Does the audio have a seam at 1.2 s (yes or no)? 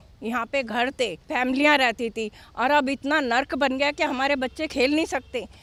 no